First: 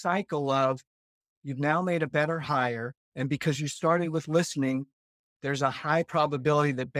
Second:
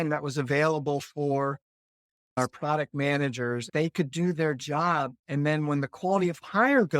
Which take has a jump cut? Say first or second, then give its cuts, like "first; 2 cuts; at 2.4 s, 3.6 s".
second; 3 cuts; at 2.4 s, 3.7 s, 5.2 s